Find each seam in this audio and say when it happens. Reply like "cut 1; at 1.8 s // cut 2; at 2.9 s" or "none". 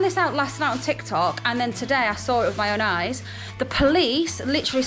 none